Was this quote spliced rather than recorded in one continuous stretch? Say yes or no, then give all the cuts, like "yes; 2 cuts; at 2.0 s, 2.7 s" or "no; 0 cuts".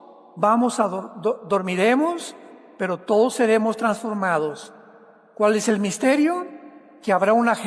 no; 0 cuts